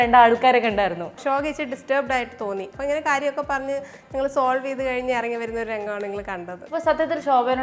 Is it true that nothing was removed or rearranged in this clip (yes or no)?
no